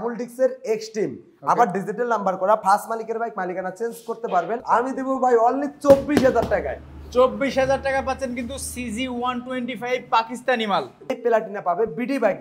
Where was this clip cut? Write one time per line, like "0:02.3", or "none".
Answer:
0:04.6
0:11.1